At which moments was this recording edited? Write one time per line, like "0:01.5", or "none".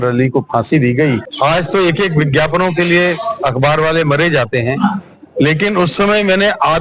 0:01.3